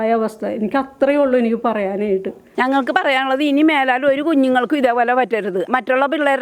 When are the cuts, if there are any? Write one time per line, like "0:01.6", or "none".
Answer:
0:02.4